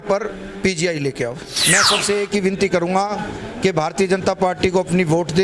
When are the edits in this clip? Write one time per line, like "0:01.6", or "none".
0:01.5